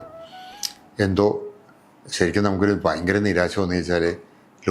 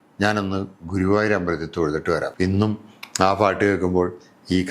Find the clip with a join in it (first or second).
second